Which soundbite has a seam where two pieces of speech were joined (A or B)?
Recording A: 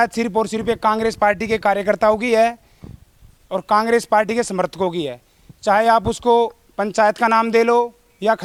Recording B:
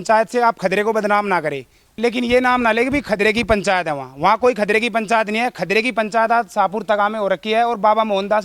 B